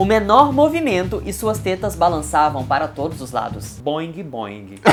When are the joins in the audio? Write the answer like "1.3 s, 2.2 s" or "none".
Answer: none